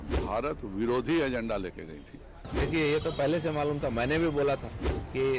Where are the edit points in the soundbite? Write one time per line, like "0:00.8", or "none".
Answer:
0:02.4